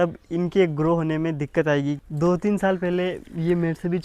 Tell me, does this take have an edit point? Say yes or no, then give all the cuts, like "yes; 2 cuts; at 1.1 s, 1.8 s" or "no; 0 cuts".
yes; 1 cut; at 2.0 s